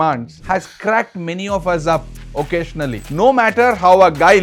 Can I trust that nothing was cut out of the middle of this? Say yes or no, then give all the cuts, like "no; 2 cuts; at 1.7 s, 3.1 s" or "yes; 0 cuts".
no; 1 cut; at 3.1 s